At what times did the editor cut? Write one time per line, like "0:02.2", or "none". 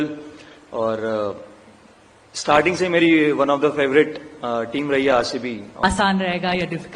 0:05.8